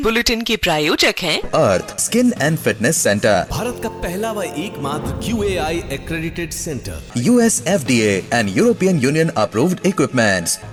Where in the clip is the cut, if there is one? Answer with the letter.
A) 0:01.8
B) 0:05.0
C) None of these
C